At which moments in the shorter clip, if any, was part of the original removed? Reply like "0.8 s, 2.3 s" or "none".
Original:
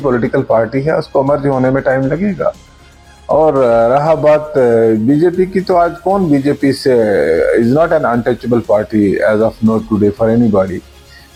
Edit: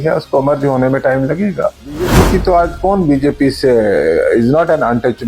2.1 s